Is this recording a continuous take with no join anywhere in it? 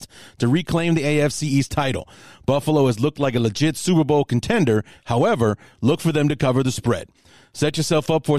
yes; 0 cuts

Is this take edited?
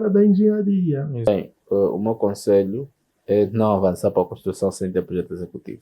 yes; 1 cut; at 1.3 s

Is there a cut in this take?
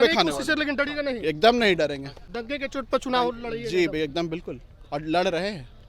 no; 0 cuts

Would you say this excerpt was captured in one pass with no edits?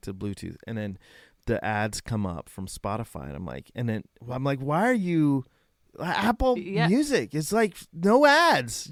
yes; 0 cuts

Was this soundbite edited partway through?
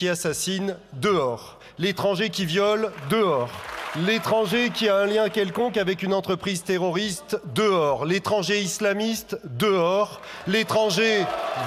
no; 0 cuts

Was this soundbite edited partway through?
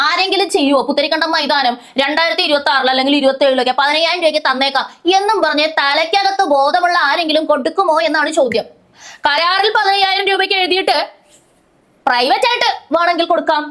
no; 0 cuts

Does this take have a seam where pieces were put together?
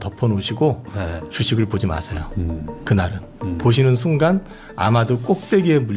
no; 0 cuts

